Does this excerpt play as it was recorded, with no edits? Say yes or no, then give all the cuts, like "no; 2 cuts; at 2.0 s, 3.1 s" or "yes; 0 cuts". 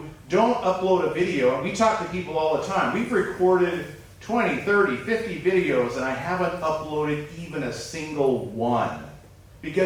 yes; 0 cuts